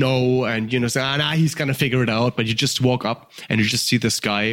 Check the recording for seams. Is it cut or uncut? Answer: uncut